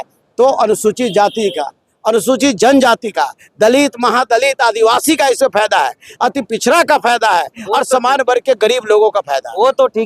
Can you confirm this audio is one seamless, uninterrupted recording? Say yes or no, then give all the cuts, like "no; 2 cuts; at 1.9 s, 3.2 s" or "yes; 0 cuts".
yes; 0 cuts